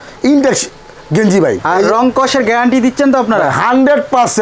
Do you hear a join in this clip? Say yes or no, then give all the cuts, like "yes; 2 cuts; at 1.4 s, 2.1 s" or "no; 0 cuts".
yes; 1 cut; at 1.6 s